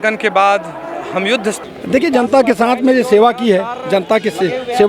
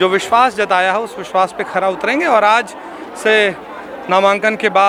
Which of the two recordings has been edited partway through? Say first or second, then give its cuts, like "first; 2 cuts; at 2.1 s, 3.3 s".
first; 1 cut; at 1.6 s